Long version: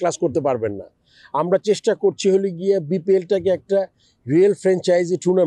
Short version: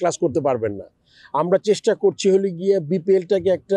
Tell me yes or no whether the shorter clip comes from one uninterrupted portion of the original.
yes